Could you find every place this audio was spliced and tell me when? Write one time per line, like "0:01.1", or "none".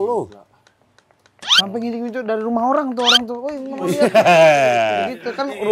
none